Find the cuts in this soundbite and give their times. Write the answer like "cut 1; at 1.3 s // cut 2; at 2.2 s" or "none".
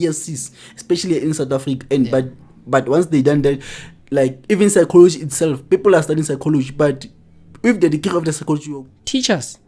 cut 1; at 8.7 s